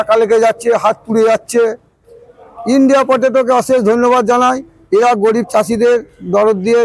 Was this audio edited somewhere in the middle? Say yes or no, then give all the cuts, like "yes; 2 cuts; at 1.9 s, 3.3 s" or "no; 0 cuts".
no; 0 cuts